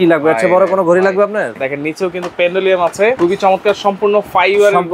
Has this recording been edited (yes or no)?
yes